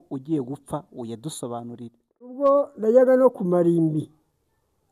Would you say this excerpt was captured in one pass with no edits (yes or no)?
no